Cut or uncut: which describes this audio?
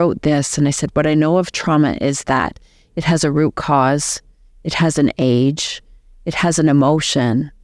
uncut